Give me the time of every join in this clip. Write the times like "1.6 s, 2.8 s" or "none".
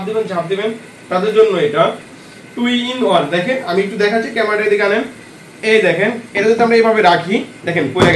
2.2 s